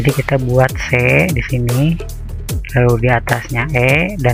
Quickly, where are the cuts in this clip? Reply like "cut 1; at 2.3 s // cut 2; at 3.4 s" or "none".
none